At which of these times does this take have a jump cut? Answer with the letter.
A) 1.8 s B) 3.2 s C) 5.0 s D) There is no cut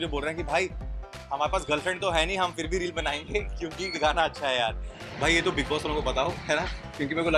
C